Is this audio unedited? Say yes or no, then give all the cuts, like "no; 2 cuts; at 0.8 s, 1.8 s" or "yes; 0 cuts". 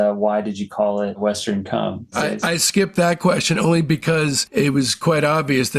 no; 2 cuts; at 2.3 s, 4.4 s